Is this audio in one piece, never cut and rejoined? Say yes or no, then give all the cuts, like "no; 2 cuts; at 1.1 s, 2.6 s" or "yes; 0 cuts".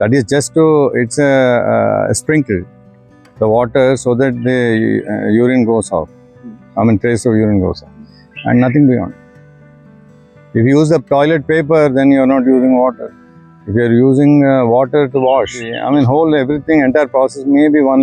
no; 1 cut; at 15.8 s